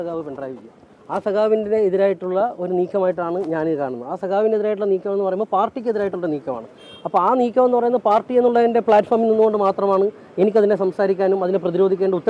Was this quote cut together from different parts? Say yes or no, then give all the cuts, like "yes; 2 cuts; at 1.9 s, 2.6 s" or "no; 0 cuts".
no; 0 cuts